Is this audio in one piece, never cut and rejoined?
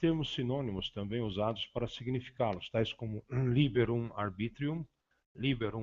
no; 1 cut; at 2.1 s

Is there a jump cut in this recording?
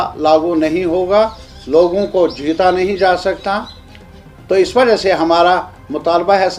no; 0 cuts

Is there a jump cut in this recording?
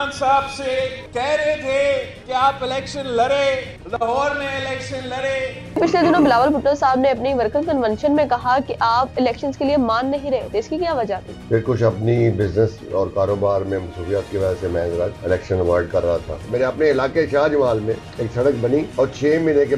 yes; 9 cuts; at 1.0 s, 2.2 s, 3.8 s, 5.8 s, 11.3 s, 15.2 s, 16.4 s, 18.1 s, 18.9 s

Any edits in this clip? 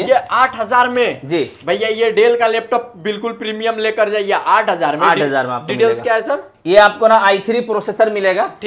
no; 0 cuts

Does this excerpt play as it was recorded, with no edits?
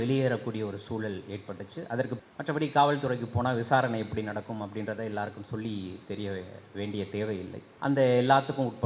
no; 2 cuts; at 2.2 s, 7.6 s

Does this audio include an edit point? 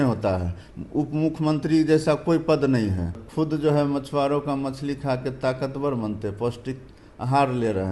yes; 1 cut; at 3.2 s

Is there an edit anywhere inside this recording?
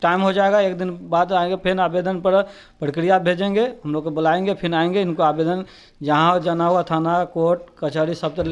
no; 0 cuts

